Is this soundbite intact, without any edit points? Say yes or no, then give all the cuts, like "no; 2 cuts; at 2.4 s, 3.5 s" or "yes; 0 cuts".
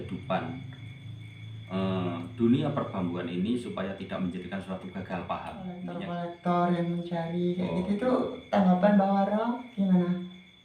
no; 1 cut; at 5.9 s